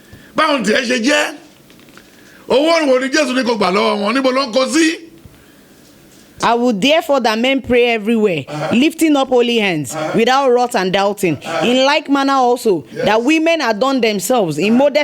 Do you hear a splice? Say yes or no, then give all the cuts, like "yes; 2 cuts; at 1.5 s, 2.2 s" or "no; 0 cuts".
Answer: yes; 1 cut; at 6.4 s